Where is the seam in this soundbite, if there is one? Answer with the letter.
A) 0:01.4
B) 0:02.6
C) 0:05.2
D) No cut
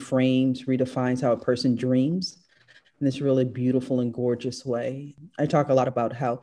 C